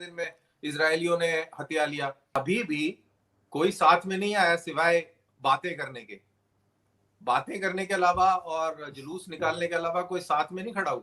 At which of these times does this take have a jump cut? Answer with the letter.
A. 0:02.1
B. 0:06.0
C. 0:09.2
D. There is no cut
A